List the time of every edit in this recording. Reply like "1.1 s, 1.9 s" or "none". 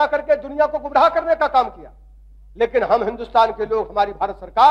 none